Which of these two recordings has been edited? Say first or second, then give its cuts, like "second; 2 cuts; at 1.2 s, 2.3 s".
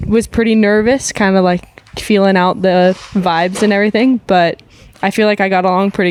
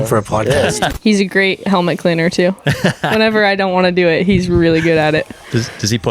second; 1 cut; at 0.9 s